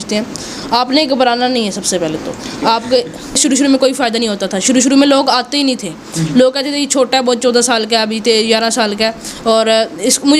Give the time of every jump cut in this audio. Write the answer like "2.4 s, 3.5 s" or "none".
3.4 s